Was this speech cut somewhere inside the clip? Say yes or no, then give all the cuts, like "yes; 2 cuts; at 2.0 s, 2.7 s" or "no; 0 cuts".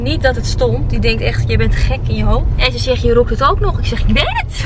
no; 0 cuts